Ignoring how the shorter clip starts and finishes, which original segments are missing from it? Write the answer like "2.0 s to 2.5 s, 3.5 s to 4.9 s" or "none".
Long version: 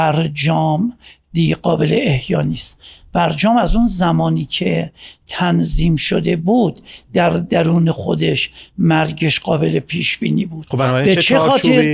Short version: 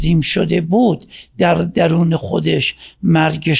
none